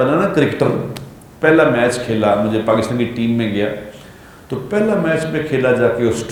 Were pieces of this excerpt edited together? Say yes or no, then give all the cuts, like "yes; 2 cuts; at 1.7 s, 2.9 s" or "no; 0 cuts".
no; 0 cuts